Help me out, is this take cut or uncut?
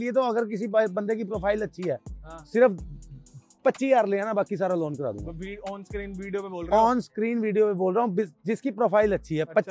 uncut